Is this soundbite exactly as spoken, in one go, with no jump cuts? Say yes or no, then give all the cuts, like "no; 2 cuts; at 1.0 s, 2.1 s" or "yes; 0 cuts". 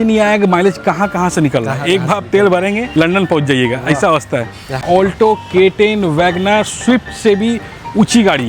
no; 1 cut; at 4.8 s